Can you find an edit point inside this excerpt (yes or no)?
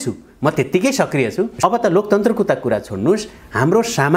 yes